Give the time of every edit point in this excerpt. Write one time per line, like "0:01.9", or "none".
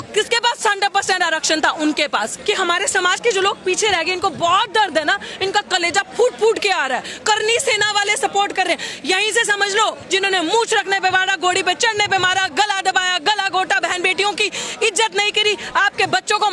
0:02.3
0:10.0